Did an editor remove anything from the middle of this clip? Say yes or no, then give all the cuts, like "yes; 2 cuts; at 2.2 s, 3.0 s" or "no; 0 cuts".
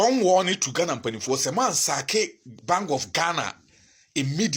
no; 0 cuts